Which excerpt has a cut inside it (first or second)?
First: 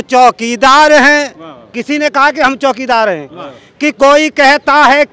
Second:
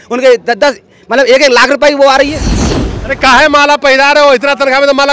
second